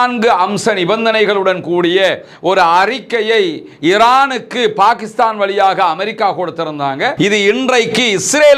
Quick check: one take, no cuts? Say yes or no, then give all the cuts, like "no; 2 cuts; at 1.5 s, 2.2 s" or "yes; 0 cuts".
no; 1 cut; at 7.1 s